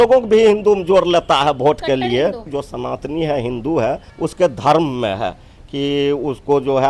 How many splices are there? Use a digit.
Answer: 2